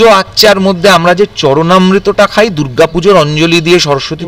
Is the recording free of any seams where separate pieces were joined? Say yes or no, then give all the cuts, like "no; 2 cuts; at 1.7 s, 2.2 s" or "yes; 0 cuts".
yes; 0 cuts